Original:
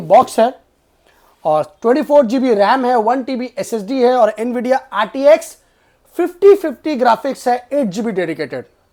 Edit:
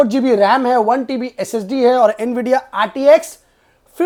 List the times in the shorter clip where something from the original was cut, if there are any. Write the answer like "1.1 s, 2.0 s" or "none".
none